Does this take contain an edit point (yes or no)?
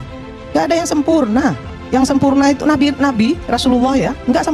yes